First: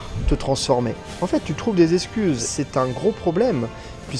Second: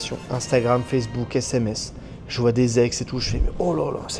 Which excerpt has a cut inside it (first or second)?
first